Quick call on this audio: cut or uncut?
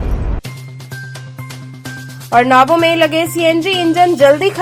cut